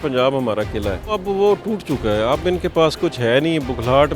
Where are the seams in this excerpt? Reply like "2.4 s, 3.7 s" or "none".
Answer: 1.2 s